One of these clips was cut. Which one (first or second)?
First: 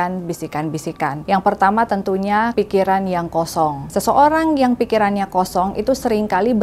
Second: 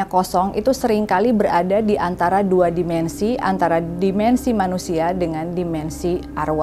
first